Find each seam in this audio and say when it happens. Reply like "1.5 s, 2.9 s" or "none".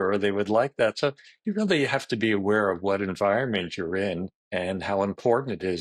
4.4 s